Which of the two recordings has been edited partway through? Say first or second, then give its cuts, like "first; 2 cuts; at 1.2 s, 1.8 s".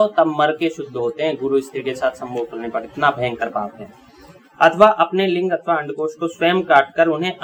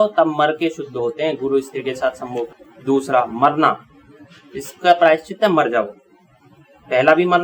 second; 1 cut; at 2.6 s